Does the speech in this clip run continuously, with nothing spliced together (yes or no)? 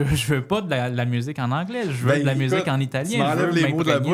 yes